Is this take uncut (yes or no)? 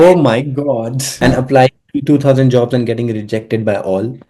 no